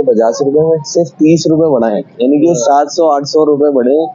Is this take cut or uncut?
uncut